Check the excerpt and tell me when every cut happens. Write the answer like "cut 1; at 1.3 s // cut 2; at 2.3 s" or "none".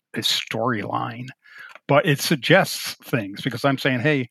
cut 1; at 1.5 s